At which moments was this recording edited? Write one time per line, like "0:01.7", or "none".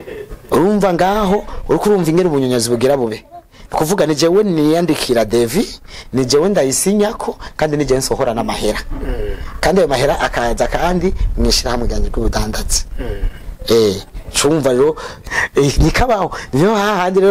0:15.1